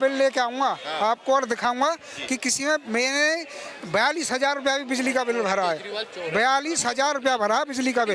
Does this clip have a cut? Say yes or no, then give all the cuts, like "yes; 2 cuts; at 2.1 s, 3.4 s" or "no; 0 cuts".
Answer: no; 0 cuts